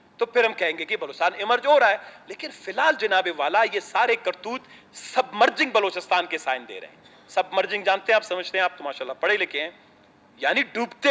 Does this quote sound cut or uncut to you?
uncut